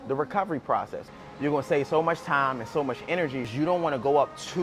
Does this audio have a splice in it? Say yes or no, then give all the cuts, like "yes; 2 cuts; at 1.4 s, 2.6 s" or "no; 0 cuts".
yes; 2 cuts; at 1.0 s, 3.5 s